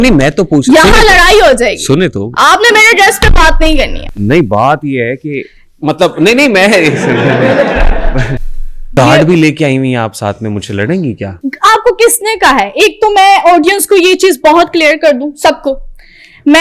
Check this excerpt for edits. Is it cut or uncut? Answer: cut